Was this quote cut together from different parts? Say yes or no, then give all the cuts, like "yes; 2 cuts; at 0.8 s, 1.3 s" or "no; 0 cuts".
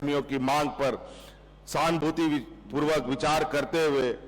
no; 0 cuts